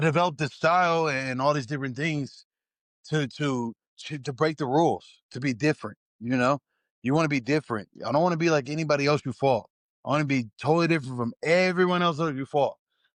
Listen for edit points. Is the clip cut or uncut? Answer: uncut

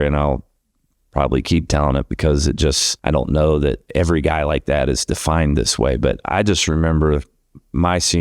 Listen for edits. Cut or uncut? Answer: cut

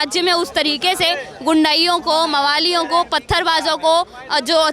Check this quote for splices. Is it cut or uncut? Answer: uncut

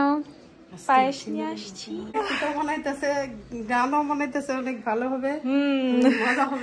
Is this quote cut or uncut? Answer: cut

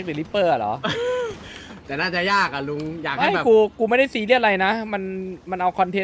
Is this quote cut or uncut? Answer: uncut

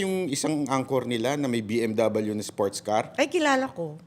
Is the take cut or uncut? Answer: cut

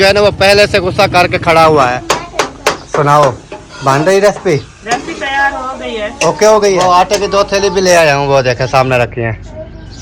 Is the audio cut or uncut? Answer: cut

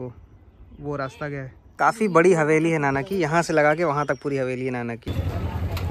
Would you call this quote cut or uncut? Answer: cut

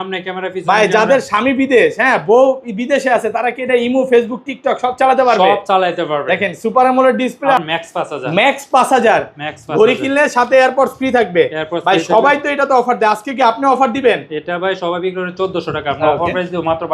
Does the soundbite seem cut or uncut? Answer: cut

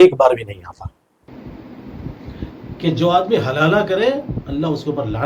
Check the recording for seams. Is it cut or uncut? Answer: cut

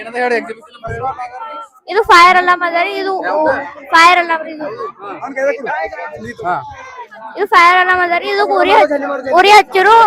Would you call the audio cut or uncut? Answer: uncut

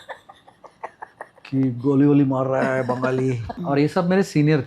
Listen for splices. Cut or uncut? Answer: cut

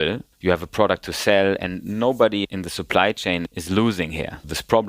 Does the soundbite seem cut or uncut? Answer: cut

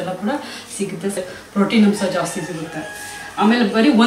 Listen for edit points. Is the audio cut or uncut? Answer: cut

